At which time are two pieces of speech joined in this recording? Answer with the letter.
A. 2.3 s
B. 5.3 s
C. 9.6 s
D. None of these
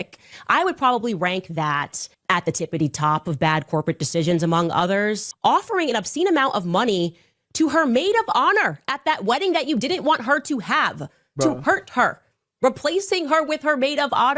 B